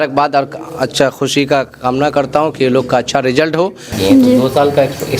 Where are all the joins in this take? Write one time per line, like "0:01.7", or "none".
0:03.9